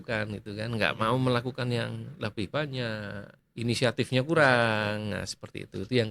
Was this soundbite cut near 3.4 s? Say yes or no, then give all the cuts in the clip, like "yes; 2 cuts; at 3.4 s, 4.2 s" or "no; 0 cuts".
no; 0 cuts